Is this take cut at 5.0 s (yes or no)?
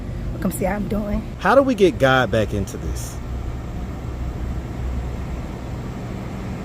no